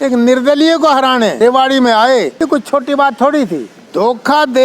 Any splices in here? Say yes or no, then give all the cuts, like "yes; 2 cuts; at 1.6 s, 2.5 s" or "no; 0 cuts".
yes; 3 cuts; at 1.3 s, 2.3 s, 3.8 s